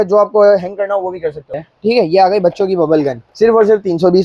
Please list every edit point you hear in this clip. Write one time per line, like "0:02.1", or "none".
0:01.5
0:03.3